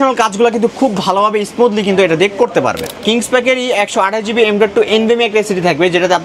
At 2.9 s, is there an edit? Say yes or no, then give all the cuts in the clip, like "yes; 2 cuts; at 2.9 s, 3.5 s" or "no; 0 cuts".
yes; 1 cut; at 2.9 s